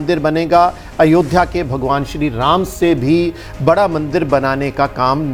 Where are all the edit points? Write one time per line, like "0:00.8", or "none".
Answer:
none